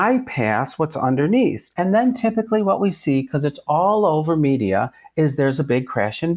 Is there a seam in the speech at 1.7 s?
yes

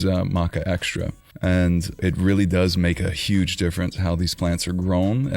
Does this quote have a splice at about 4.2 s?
no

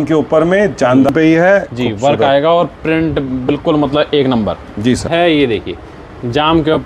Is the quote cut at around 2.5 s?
no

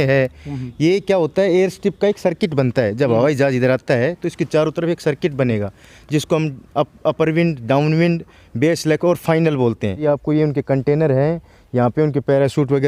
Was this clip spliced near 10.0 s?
yes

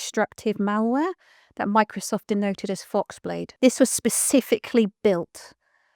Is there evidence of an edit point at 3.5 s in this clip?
yes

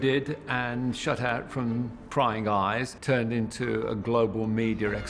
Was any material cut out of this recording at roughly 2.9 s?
yes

